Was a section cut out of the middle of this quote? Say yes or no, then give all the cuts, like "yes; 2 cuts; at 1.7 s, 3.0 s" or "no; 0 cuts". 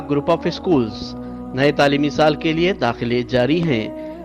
no; 0 cuts